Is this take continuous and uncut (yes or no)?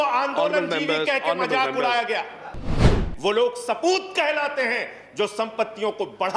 no